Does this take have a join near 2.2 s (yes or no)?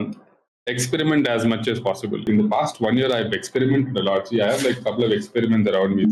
yes